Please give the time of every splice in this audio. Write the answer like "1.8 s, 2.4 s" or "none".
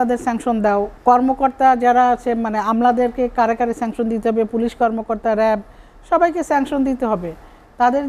0.9 s